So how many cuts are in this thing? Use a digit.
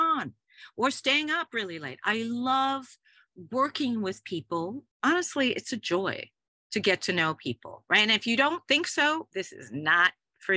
1